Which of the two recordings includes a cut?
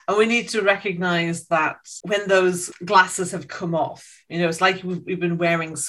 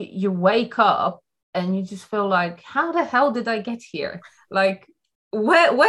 first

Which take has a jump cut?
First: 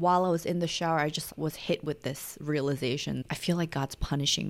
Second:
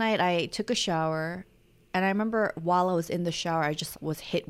first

